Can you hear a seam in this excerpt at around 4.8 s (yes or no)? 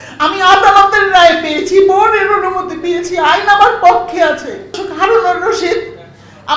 yes